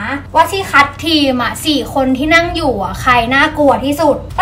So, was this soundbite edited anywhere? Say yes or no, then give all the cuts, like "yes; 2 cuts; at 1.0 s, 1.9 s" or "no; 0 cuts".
no; 0 cuts